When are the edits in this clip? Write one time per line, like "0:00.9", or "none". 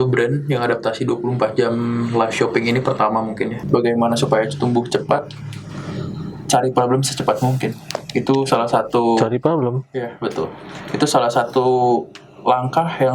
0:03.6

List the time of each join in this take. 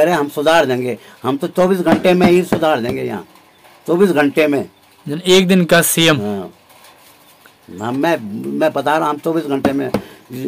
none

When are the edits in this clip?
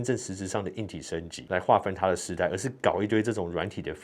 none

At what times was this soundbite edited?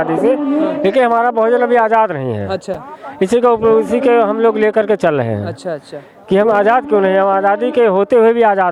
none

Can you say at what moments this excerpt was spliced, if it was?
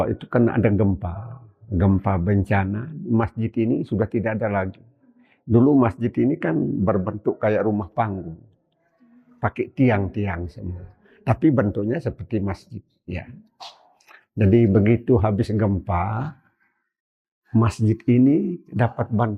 none

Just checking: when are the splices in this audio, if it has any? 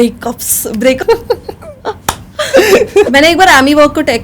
0:01.0
0:03.1

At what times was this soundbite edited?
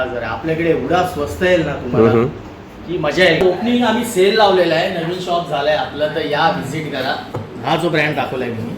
0:03.4
0:07.3

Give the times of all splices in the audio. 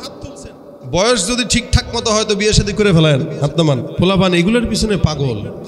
0:03.9

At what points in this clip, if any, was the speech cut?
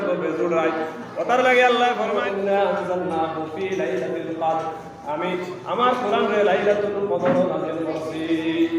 0:02.1

